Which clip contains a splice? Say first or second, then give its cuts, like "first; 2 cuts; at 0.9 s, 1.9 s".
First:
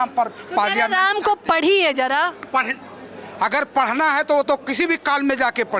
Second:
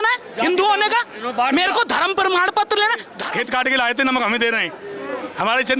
second; 1 cut; at 3.1 s